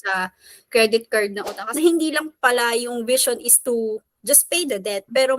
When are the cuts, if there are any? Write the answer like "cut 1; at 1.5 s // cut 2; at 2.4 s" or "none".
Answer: cut 1; at 1.5 s